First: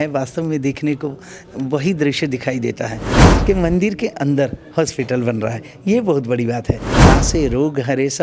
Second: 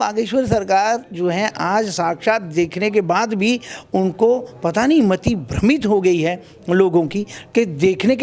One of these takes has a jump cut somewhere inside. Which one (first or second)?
first